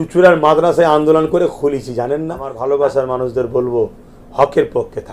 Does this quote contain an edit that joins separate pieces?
yes; 1 cut; at 2.5 s

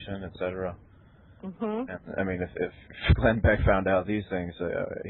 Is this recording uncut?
yes; 0 cuts

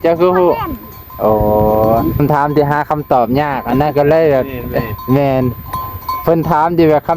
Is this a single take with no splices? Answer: no; 1 cut; at 2.2 s

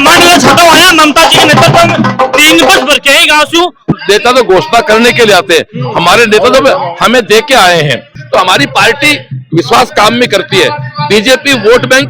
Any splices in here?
yes; 2 cuts; at 3.9 s, 8.1 s

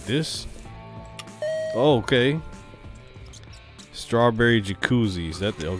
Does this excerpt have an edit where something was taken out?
no; 0 cuts

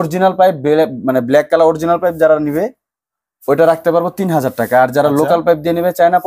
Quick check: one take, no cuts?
yes; 0 cuts

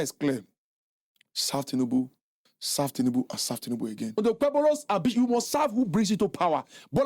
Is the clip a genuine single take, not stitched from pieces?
no; 1 cut; at 4.2 s

